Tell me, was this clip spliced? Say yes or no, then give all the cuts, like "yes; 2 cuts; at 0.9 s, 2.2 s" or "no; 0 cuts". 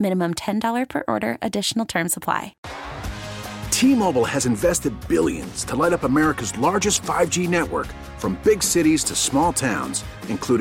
yes; 1 cut; at 2.6 s